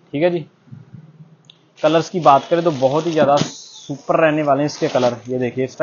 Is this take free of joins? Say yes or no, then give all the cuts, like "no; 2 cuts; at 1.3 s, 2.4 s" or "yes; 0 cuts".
yes; 0 cuts